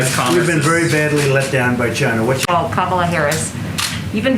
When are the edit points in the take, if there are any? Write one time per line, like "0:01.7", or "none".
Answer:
0:02.5